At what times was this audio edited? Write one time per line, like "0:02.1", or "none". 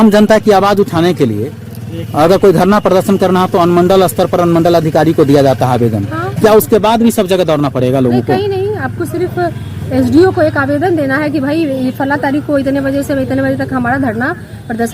none